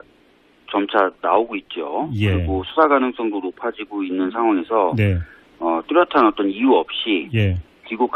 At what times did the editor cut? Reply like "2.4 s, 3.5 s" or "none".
1.6 s